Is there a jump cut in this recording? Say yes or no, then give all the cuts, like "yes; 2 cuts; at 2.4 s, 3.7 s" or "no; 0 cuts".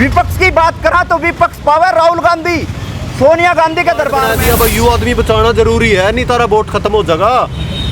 yes; 1 cut; at 4.3 s